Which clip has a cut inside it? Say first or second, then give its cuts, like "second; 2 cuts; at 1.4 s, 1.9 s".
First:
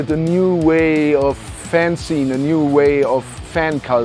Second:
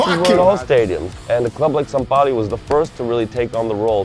second; 1 cut; at 1.1 s